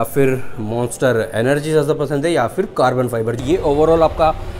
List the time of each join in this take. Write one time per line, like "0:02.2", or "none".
0:03.4